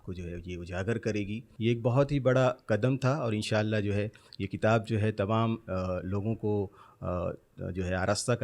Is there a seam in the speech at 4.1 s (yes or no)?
no